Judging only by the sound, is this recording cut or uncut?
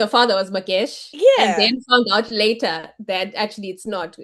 uncut